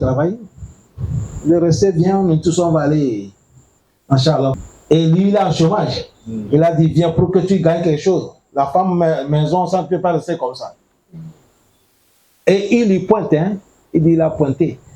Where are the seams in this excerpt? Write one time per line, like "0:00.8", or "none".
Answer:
0:04.5